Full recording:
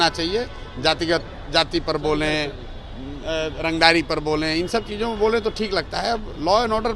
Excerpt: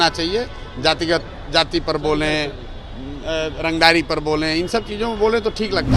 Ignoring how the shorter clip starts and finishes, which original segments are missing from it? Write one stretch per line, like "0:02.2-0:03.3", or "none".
none